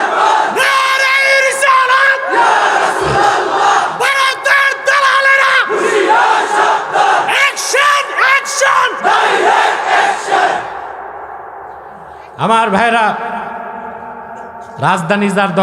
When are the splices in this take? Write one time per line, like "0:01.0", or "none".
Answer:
0:14.7